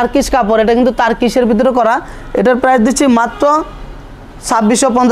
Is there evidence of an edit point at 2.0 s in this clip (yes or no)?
no